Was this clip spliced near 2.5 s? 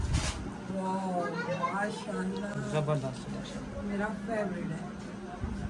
no; 0 cuts

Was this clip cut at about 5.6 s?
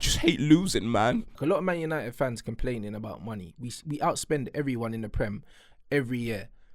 no; 1 cut; at 1.3 s

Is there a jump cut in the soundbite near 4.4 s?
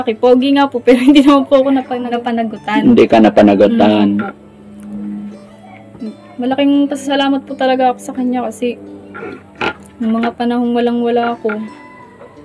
no; 0 cuts

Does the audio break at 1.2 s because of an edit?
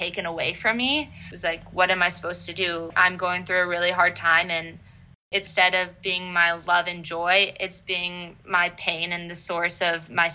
yes; 3 cuts; at 1.2 s, 2.9 s, 5.3 s

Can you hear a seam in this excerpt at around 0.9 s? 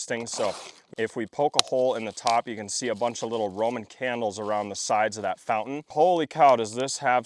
yes; 2 cuts; at 0.9 s, 5.9 s

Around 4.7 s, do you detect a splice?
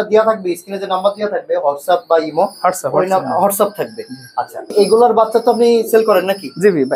yes; 1 cut; at 4.7 s

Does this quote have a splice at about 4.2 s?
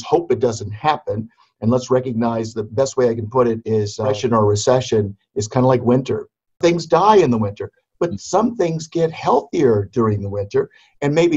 yes; 2 cuts; at 4.2 s, 6.6 s

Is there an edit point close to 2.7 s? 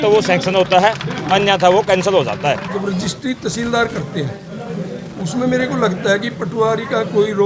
yes; 1 cut; at 2.7 s

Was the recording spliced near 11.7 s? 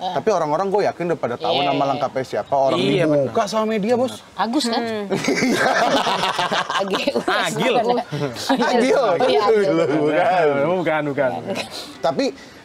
yes; 1 cut; at 11.7 s

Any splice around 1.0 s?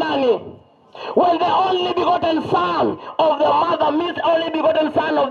no; 0 cuts

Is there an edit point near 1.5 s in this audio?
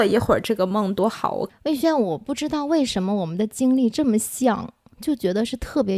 yes; 1 cut; at 1.5 s

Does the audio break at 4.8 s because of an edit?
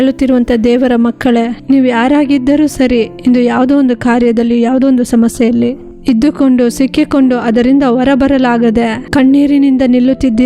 no; 2 cuts; at 1.6 s, 9.0 s

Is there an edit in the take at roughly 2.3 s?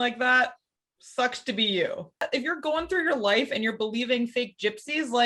yes; 1 cut; at 2.3 s

